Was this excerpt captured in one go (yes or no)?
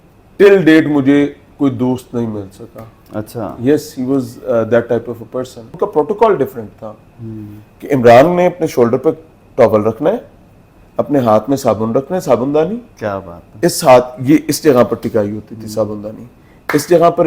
no